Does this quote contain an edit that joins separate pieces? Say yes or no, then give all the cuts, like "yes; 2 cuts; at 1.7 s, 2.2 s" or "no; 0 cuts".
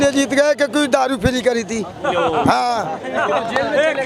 no; 0 cuts